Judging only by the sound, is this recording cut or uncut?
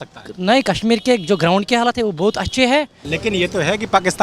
cut